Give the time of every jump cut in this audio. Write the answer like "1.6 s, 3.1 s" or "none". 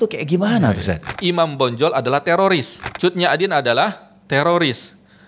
1.1 s, 2.8 s

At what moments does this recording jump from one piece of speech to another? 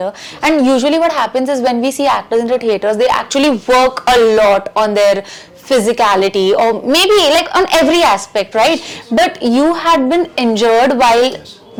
none

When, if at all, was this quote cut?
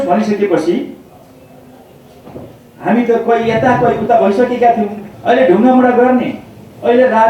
5.1 s

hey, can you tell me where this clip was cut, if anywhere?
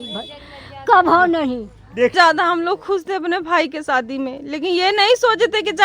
2.1 s

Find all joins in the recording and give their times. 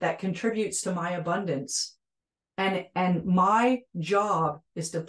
none

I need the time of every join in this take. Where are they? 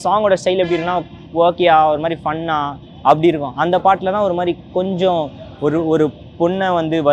none

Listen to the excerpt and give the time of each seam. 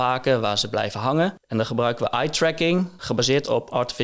1.4 s, 3.0 s

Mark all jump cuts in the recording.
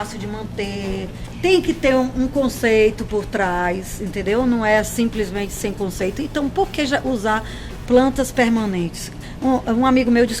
1.2 s

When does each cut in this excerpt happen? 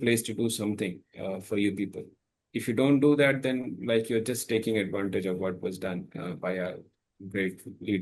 none

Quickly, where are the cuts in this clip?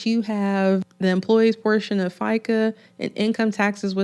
0.9 s

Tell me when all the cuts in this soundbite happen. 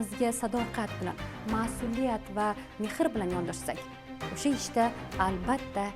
none

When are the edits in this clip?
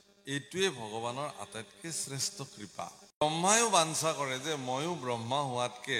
3.2 s

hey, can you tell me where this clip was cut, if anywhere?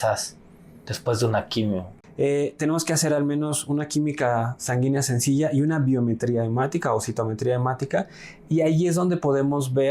1.9 s

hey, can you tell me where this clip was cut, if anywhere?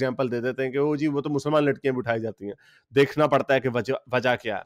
none

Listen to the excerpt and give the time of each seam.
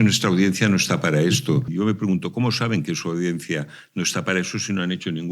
1.7 s

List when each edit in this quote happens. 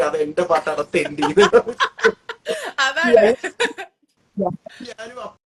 none

